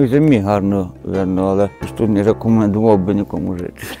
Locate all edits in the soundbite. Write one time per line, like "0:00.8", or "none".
0:01.8